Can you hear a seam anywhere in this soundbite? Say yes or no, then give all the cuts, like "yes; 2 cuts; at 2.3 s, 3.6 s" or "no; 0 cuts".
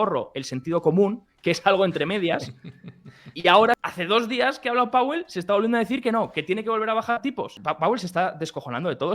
yes; 2 cuts; at 3.8 s, 7.6 s